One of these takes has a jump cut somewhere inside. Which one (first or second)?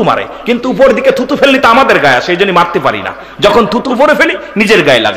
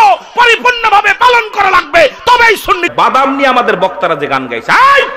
second